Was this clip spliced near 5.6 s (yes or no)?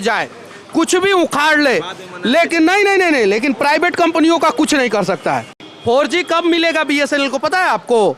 yes